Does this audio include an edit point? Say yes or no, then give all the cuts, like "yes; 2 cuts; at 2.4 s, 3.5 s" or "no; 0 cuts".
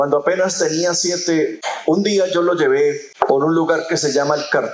yes; 2 cuts; at 1.7 s, 3.1 s